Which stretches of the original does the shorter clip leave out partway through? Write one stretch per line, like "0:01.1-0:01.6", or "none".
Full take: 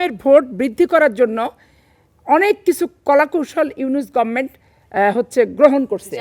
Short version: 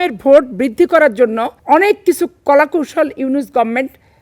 0:01.5-0:02.1